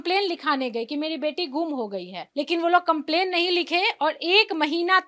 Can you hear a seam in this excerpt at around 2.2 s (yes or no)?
yes